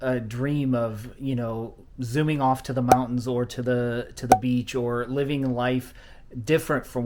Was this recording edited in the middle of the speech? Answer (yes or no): no